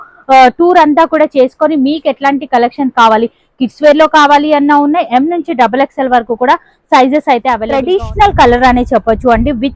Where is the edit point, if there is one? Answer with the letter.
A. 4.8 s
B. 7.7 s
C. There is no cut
B